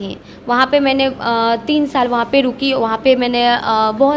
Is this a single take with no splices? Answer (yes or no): yes